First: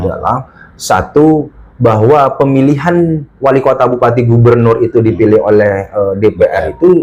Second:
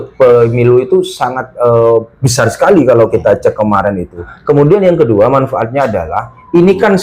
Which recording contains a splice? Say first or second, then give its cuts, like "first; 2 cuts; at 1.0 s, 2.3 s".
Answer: second; 1 cut; at 4.3 s